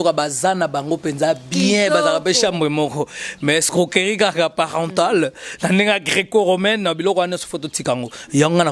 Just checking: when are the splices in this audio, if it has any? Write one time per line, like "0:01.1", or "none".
none